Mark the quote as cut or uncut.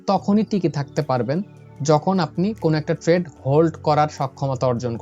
uncut